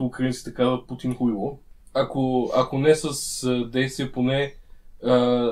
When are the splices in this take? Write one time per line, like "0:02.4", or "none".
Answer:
0:01.7